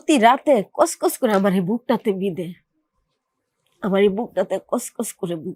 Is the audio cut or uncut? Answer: uncut